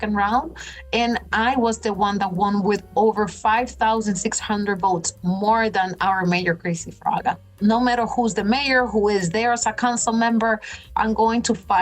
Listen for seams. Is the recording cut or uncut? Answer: cut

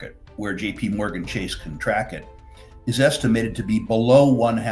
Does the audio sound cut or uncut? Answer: uncut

